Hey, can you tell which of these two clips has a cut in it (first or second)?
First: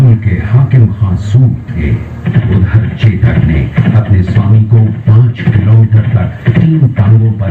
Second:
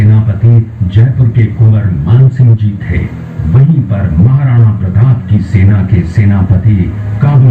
first